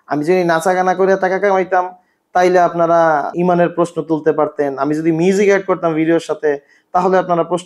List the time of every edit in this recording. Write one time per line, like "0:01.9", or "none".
0:03.3